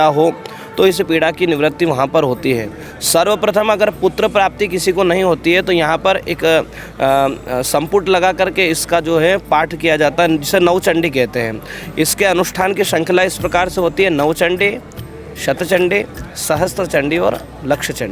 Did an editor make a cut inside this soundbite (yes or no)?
no